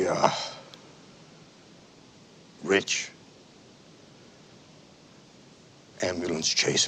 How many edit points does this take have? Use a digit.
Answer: 0